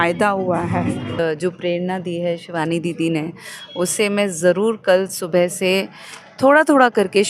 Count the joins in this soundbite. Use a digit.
1